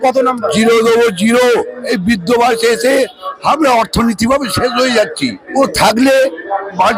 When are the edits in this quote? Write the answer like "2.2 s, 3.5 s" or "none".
1.8 s, 5.4 s